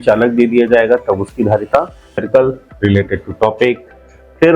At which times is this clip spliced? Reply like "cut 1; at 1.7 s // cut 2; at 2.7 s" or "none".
cut 1; at 2.2 s